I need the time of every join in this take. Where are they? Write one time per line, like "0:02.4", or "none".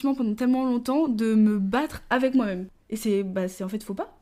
none